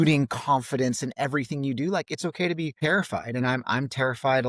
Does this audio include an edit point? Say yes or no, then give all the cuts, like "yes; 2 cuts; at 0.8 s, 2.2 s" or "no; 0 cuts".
yes; 1 cut; at 2.7 s